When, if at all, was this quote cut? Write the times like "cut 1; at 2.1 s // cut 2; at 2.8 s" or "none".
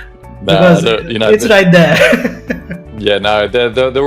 none